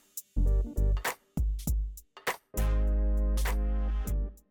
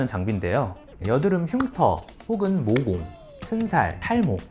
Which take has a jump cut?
second; 1 cut; at 0.9 s

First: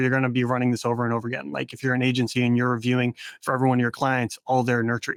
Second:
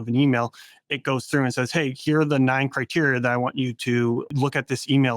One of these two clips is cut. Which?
second; 1 cut; at 4.3 s

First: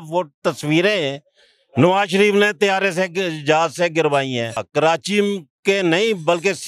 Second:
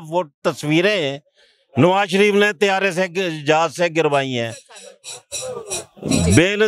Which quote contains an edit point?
first; 1 cut; at 4.7 s

